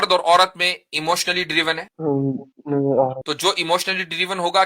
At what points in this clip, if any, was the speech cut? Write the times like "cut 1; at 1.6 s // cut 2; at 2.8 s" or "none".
cut 1; at 1.9 s // cut 2; at 3.3 s